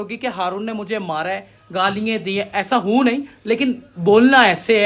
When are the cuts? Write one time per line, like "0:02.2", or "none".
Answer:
none